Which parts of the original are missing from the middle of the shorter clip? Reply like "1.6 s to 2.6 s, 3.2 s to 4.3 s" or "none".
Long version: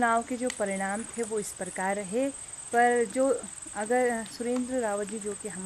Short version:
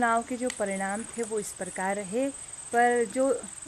none